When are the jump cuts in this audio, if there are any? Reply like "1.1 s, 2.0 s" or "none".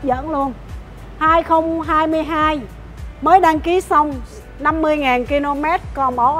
none